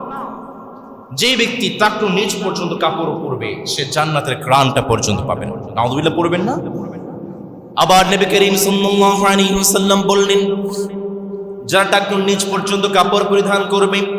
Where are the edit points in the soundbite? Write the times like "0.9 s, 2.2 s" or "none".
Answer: none